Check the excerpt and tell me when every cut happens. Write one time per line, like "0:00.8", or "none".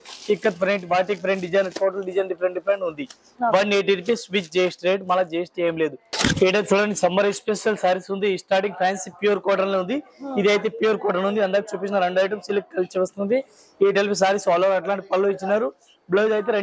none

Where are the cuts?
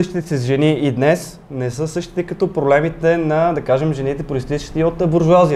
none

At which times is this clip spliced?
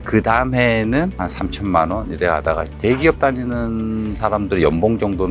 0:02.7

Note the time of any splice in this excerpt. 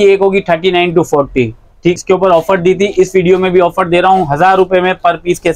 0:02.0

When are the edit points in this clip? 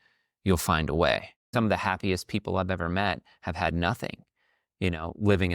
0:01.4

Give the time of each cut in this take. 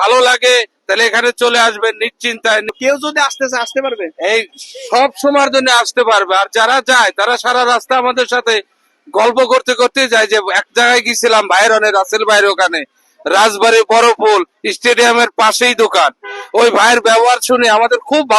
0:02.8

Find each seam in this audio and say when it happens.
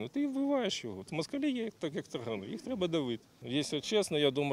0:01.1
0:03.3

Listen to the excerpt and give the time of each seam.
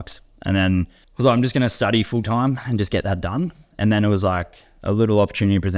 0:01.0

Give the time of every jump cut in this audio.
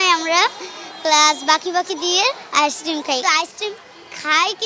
0:03.2

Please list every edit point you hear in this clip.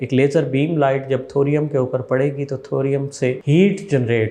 0:03.4

